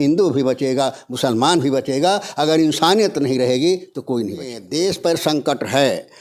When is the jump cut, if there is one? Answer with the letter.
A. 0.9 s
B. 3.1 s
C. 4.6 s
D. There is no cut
C